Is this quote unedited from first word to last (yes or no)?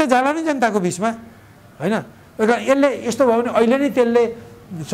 yes